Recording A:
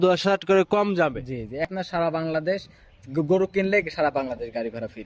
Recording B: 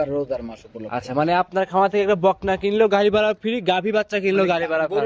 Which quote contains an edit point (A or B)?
A